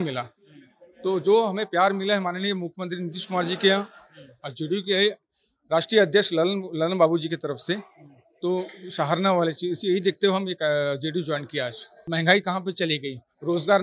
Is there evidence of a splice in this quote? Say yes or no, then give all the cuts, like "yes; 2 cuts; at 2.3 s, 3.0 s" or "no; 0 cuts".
yes; 1 cut; at 12.1 s